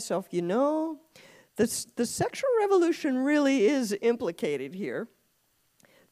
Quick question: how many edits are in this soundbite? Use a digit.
0